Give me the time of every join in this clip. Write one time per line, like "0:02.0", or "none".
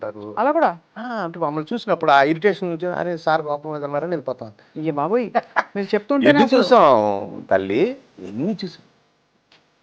0:04.6